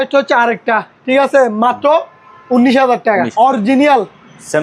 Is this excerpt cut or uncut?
cut